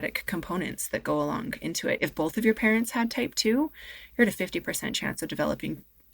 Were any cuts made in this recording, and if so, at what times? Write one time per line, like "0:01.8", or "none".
0:02.0